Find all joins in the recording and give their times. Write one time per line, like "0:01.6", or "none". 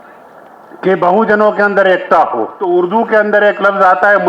0:02.5